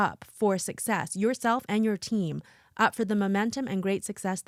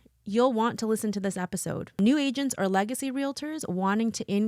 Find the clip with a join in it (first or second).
second